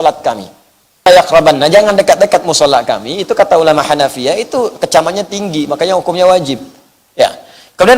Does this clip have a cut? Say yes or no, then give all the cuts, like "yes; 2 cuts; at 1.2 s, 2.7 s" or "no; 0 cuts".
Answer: yes; 1 cut; at 1.1 s